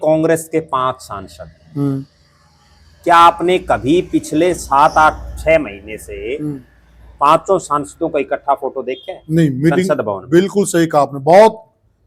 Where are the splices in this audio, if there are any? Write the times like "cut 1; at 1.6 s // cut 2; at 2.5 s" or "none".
none